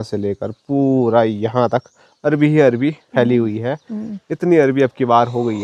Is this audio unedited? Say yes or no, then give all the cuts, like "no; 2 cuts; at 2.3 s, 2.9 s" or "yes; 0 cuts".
yes; 0 cuts